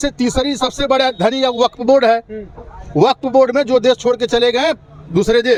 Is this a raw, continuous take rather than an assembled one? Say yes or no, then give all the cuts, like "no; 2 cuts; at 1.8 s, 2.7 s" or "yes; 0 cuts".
yes; 0 cuts